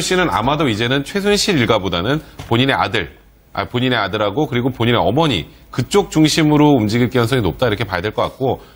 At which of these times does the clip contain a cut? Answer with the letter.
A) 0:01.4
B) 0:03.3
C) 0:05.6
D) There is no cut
A